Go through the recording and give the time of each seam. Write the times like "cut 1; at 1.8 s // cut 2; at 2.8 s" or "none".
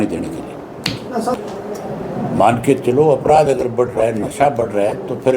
cut 1; at 1.3 s